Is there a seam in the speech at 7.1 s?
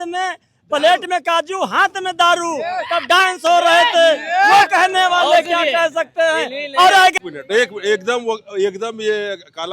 yes; 1 cut; at 7.1 s

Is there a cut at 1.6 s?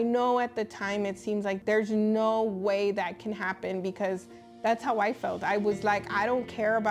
yes; 1 cut; at 1.6 s

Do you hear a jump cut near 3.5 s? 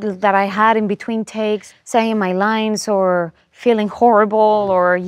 no; 1 cut; at 1.7 s

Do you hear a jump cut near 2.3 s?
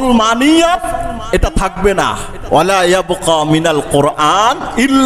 yes; 1 cut; at 2.3 s

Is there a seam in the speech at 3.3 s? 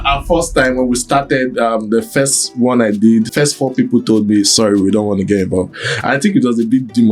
yes; 1 cut; at 3.3 s

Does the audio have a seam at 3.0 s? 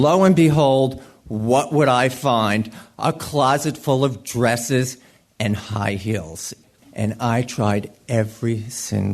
no; 1 cut; at 6.8 s

